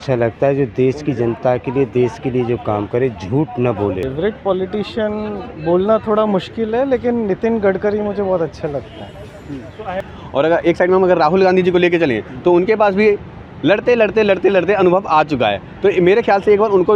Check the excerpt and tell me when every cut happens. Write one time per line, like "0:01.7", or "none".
0:04.0
0:10.0

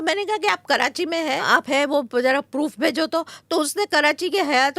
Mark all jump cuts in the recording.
0:01.4

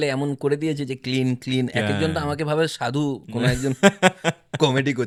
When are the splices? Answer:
none

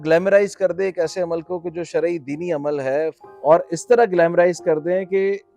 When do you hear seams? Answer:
none

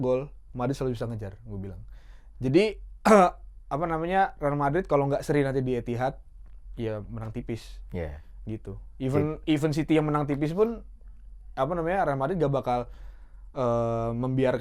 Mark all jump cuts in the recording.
none

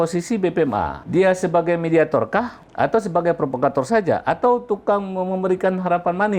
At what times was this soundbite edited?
0:01.0
0:02.6

